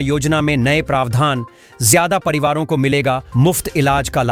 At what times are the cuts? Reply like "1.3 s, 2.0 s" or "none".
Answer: none